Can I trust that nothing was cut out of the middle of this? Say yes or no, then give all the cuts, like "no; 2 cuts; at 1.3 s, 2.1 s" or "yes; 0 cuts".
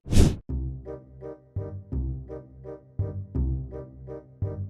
yes; 0 cuts